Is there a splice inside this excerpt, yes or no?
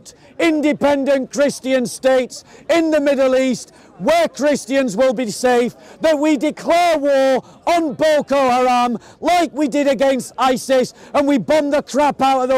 no